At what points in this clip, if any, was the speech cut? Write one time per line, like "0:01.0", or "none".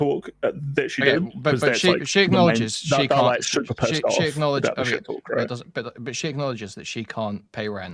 none